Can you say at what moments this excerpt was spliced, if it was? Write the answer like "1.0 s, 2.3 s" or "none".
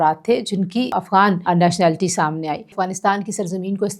1.0 s, 2.8 s